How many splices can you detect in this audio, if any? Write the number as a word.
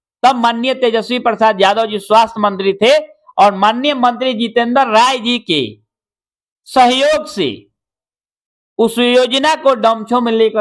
zero